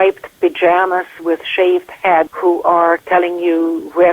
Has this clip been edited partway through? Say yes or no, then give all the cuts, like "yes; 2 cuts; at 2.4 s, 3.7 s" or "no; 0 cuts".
yes; 1 cut; at 2.3 s